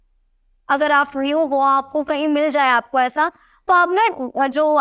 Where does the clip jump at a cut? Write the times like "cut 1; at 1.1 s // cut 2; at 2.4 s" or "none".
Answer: none